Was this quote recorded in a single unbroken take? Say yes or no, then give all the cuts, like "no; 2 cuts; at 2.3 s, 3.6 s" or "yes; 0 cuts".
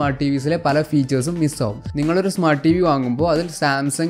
yes; 0 cuts